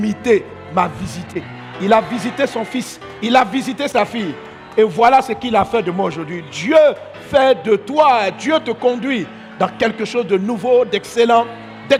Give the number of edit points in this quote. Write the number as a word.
zero